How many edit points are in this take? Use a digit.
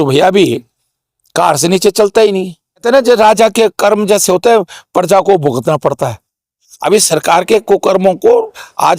1